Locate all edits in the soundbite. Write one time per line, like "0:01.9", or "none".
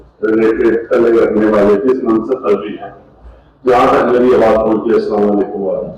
none